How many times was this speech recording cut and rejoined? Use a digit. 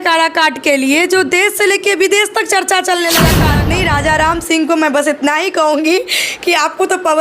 1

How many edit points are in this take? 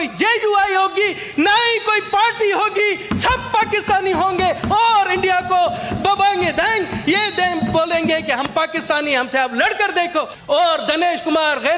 1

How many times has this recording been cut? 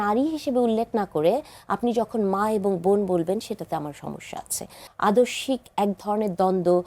1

